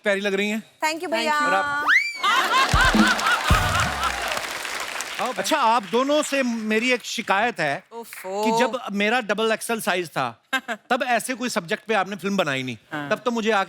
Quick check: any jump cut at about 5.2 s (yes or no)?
yes